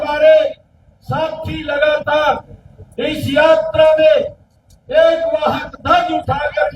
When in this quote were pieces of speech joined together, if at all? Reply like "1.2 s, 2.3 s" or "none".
none